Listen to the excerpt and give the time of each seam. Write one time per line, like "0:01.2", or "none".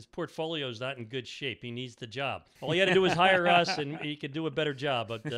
0:02.5